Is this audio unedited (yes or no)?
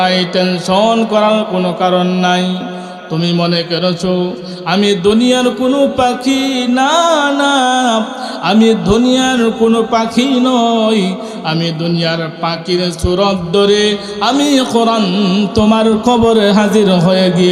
yes